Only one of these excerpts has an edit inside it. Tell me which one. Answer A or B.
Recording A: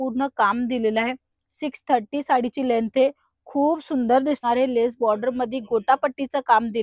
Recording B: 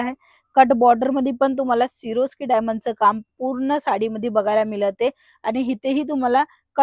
A